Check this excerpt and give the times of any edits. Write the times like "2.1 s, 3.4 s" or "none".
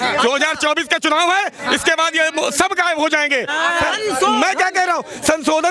3.5 s